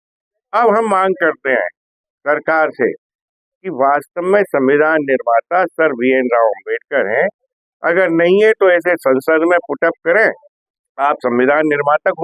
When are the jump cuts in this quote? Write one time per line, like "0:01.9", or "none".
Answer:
0:10.5